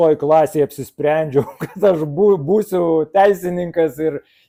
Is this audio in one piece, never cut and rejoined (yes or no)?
yes